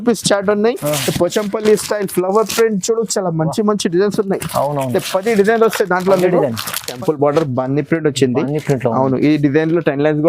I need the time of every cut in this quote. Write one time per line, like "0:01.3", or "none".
0:06.9